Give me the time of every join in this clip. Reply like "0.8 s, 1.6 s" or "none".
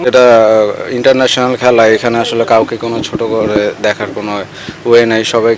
none